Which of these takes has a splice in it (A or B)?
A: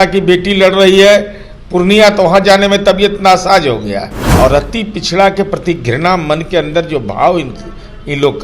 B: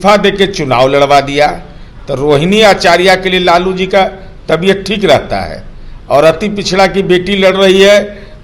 A